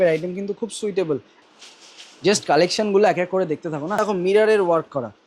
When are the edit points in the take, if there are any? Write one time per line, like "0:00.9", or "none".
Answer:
0:01.3
0:04.0